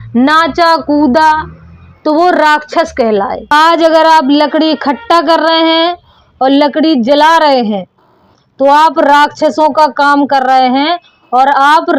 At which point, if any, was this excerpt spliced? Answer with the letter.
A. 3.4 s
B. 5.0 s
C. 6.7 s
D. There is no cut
A